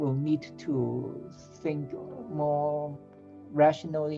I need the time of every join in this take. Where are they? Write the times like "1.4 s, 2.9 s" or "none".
none